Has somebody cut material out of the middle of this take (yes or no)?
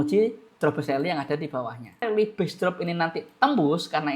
yes